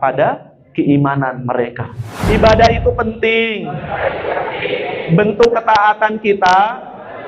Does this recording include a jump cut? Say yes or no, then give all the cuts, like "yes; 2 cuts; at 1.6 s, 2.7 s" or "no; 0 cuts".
yes; 1 cut; at 1.9 s